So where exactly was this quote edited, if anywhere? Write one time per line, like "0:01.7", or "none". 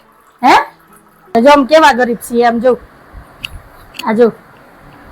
0:01.3